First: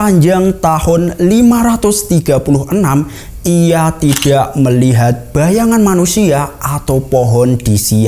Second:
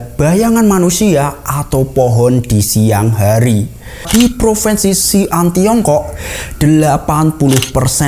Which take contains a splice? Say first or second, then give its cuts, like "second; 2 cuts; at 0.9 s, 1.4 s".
second; 1 cut; at 4.0 s